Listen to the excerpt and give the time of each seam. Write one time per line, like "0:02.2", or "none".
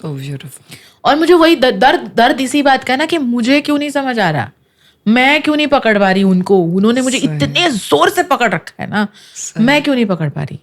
none